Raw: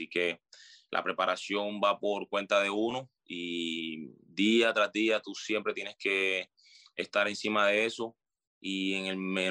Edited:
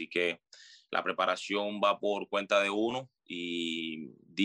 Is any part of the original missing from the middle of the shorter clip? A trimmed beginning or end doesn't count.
no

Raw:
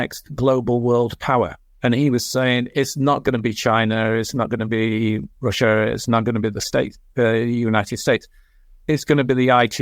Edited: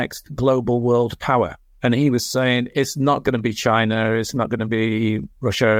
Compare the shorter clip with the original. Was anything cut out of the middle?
no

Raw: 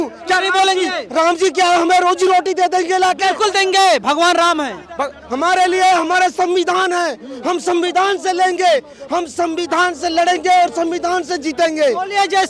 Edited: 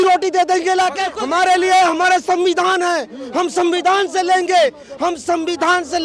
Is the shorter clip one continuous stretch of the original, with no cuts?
no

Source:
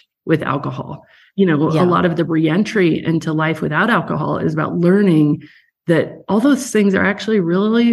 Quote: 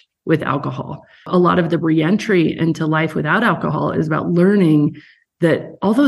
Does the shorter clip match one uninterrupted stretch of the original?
no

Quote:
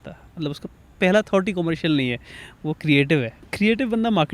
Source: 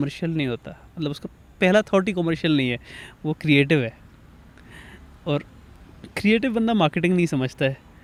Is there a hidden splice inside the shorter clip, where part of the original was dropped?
yes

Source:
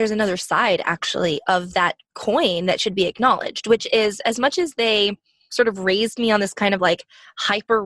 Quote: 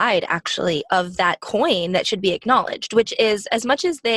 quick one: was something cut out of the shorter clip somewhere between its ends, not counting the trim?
yes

